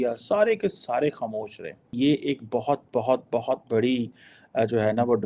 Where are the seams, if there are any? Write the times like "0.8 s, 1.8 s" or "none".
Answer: 1.9 s